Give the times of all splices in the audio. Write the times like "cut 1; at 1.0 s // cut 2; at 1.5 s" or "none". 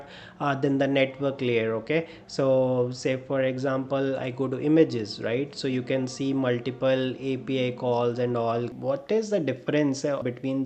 cut 1; at 8.7 s

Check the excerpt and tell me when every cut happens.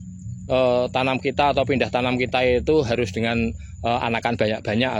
none

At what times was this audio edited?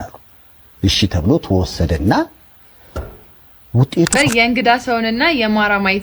cut 1; at 4.1 s

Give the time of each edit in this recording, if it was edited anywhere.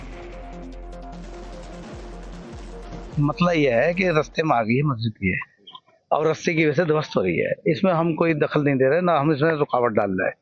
none

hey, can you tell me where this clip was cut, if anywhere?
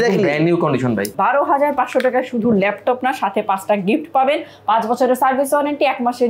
cut 1; at 1.1 s

